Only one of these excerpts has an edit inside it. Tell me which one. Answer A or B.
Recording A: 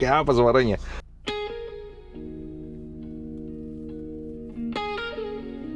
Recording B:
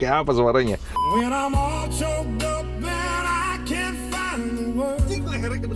B